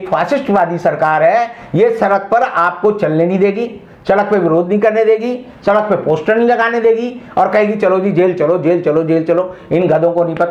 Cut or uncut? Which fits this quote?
uncut